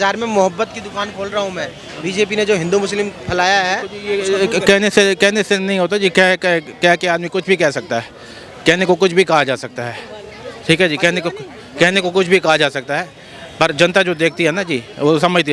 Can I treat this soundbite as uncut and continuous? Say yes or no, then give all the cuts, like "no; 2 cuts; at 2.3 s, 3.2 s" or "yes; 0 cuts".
yes; 0 cuts